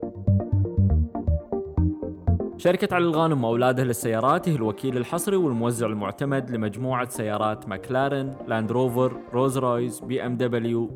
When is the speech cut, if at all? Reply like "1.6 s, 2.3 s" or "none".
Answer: 2.6 s